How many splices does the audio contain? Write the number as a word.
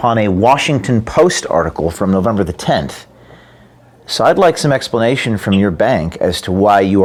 zero